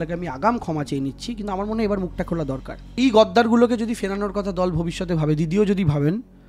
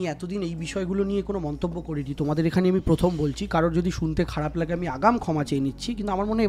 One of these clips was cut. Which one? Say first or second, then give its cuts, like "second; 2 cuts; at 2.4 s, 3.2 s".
first; 1 cut; at 3.0 s